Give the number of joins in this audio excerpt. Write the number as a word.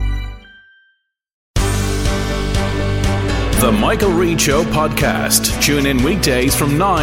one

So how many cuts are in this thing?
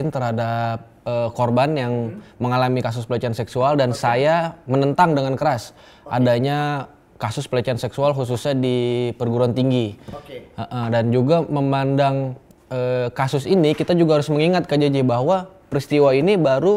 zero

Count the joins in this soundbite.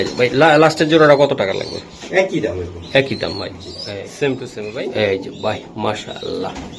one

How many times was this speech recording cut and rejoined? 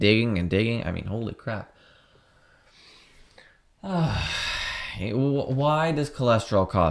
zero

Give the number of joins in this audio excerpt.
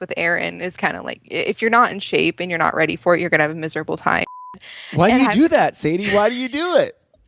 one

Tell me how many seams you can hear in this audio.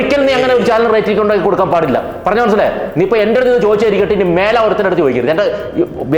zero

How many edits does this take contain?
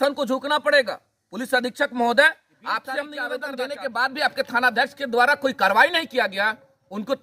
one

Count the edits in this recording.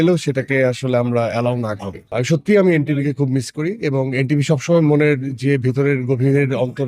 one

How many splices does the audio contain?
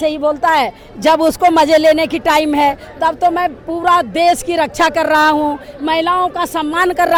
zero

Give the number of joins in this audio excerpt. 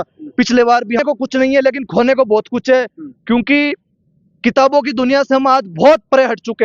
one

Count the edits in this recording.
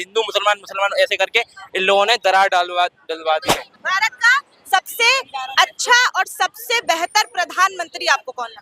one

